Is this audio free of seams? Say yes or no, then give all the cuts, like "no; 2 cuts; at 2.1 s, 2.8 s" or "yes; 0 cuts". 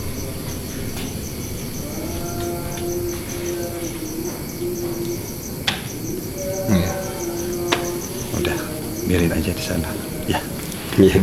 yes; 0 cuts